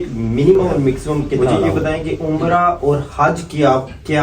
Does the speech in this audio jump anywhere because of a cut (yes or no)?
yes